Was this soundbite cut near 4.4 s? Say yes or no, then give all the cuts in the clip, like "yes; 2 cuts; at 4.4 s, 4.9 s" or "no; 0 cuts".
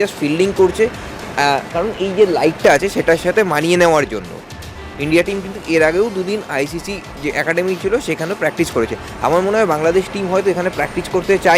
no; 0 cuts